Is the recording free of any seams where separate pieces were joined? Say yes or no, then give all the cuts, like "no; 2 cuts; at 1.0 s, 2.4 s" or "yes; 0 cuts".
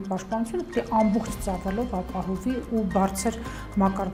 yes; 0 cuts